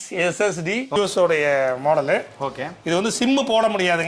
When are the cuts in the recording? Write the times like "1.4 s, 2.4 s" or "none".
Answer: 0.9 s

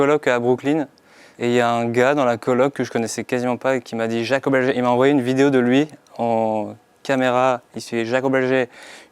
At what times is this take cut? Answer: none

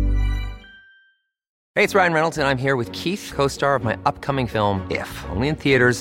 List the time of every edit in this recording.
1.5 s

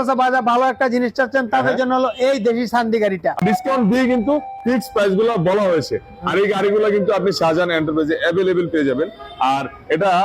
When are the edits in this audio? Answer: 3.4 s

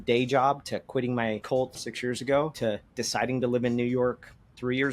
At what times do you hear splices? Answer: 1.8 s, 2.5 s

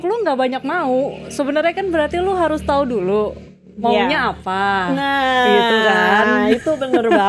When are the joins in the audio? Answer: none

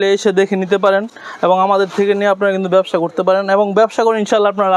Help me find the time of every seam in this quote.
none

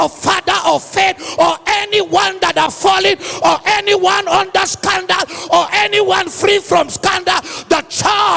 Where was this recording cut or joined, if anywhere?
none

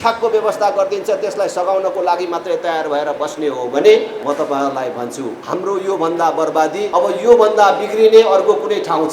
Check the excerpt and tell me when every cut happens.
4.2 s, 5.4 s, 6.9 s

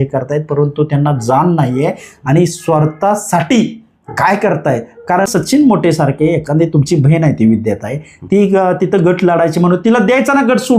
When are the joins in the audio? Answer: 5.3 s

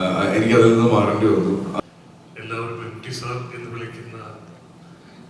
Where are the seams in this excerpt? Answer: 1.7 s

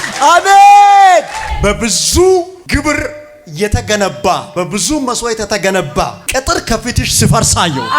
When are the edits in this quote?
1.4 s, 2.6 s, 4.5 s, 6.2 s

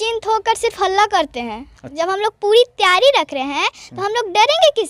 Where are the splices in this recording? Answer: 1.8 s

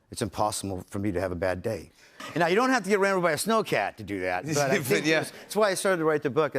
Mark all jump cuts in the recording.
2.2 s

